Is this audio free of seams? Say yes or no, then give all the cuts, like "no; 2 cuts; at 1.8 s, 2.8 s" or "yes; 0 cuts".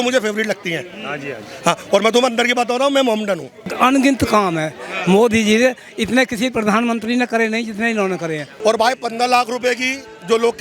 no; 2 cuts; at 3.6 s, 8.5 s